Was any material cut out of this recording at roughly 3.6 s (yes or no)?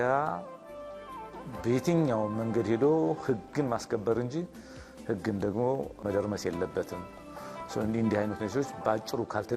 no